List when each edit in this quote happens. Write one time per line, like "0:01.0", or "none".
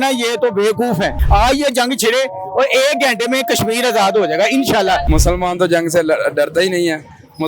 0:01.2
0:05.0